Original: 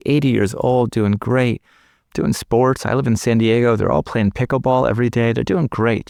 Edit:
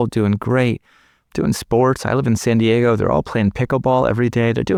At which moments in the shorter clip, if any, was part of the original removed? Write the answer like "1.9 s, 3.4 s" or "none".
none